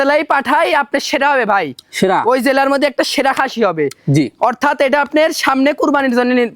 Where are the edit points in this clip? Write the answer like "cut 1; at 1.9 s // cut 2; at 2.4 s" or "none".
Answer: none